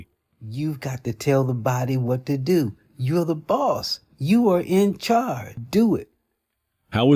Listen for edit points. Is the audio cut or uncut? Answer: uncut